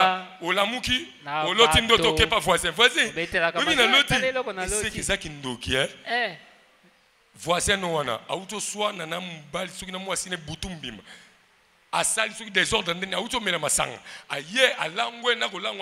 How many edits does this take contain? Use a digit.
0